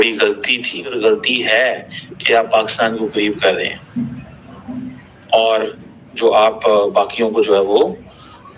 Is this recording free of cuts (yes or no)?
no